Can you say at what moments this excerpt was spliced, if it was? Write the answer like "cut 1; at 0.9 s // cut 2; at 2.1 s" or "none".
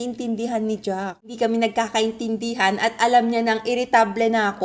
cut 1; at 1.3 s